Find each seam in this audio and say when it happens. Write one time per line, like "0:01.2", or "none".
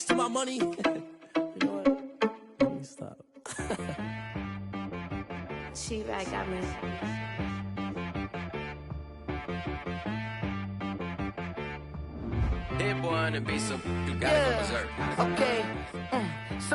0:02.9

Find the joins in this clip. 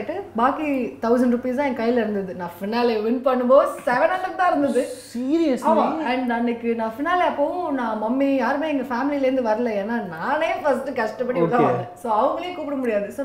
none

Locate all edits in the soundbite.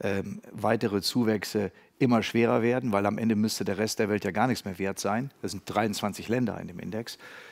none

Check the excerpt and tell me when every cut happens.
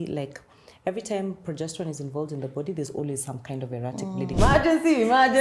0:04.4

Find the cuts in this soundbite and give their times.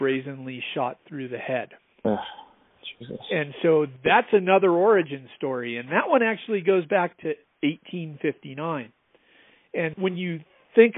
0:09.9

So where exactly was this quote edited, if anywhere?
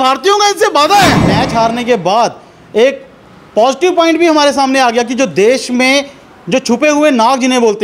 0:01.2

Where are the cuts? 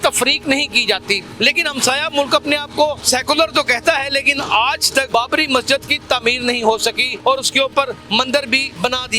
0:01.3
0:03.0
0:05.1
0:07.1
0:08.2

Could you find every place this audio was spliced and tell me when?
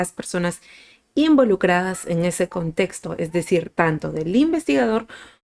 none

